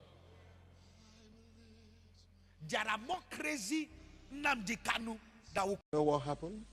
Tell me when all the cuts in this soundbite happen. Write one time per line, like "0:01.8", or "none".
0:05.8